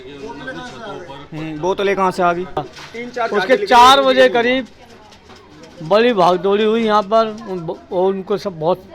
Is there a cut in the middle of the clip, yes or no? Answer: yes